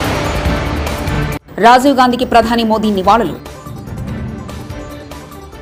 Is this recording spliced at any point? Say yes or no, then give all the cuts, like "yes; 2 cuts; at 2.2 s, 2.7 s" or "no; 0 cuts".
no; 0 cuts